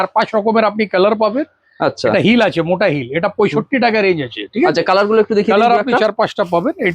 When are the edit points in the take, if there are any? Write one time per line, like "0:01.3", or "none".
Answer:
none